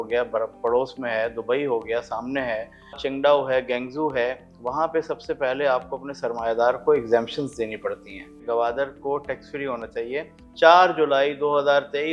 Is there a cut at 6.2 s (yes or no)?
no